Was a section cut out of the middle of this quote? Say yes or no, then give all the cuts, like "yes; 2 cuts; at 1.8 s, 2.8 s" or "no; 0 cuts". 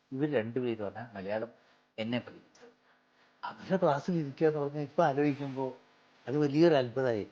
no; 0 cuts